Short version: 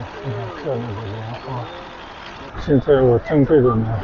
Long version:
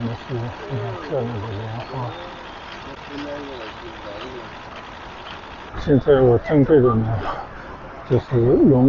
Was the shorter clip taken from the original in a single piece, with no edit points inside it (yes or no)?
no